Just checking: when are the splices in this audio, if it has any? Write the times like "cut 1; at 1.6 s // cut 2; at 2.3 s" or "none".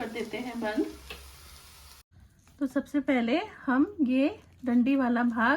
cut 1; at 2.0 s